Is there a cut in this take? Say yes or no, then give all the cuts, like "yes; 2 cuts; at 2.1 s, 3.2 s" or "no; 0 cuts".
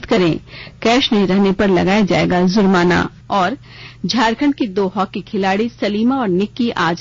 yes; 1 cut; at 3.3 s